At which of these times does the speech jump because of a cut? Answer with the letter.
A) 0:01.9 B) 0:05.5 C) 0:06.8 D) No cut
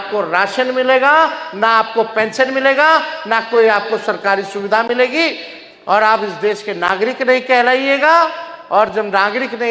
D